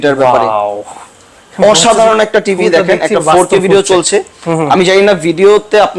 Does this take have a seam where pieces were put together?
no; 0 cuts

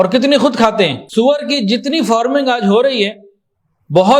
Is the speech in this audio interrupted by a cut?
yes; 1 cut; at 1.0 s

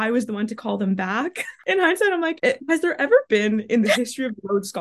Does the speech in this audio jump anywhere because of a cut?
yes; 2 cuts; at 1.5 s, 2.3 s

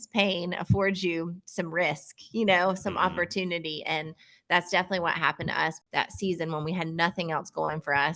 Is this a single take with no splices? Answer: no; 1 cut; at 5.8 s

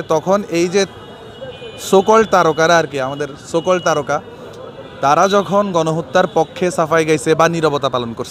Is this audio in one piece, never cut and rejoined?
yes; 0 cuts

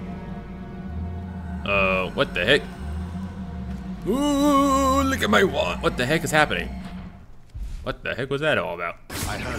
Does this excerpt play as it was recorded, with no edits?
yes; 0 cuts

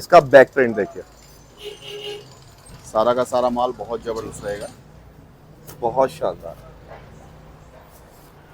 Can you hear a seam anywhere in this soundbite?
no; 0 cuts

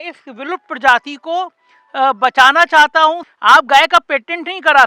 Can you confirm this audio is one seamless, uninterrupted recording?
no; 1 cut; at 3.3 s

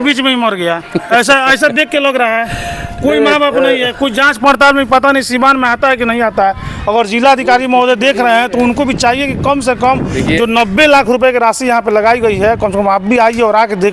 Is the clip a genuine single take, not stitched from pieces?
yes; 0 cuts

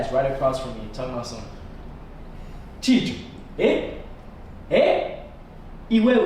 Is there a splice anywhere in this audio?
no; 0 cuts

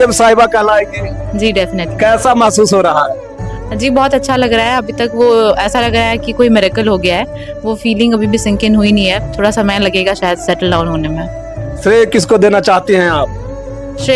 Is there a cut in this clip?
no; 0 cuts

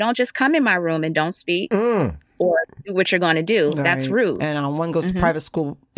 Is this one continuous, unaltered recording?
no; 1 cut; at 4.4 s

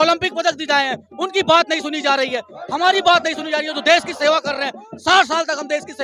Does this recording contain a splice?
no; 0 cuts

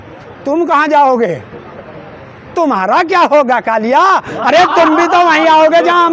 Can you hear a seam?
no; 0 cuts

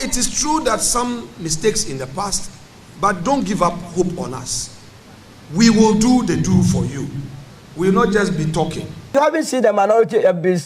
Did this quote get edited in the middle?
yes; 1 cut; at 9.1 s

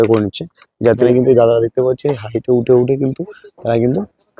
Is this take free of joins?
no; 1 cut; at 1.1 s

